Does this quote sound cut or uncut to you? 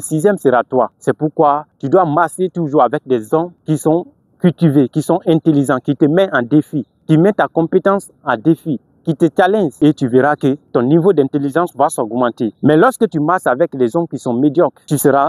cut